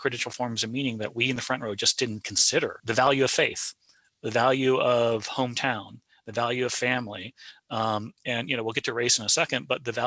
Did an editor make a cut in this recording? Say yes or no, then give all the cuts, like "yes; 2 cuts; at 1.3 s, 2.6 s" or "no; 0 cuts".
yes; 1 cut; at 2.8 s